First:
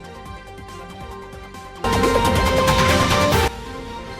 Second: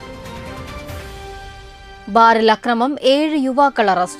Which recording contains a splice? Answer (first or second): first